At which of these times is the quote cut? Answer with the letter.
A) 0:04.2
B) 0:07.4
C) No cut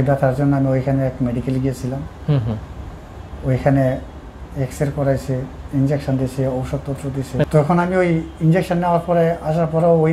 B